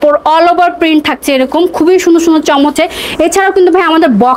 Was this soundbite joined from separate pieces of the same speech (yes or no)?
no